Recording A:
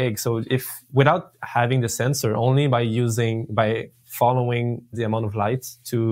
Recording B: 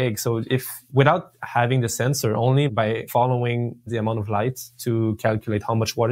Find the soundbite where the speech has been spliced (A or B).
B